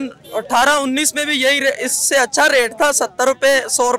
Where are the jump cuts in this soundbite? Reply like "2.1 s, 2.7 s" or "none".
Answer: none